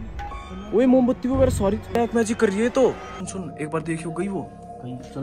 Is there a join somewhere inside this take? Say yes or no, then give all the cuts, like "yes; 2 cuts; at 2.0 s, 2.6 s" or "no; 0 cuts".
yes; 1 cut; at 3.2 s